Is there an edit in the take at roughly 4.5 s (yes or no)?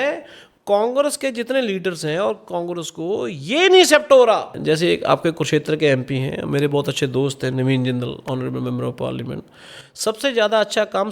yes